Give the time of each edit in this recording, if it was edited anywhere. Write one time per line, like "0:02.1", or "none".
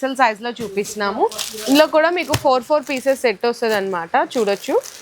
none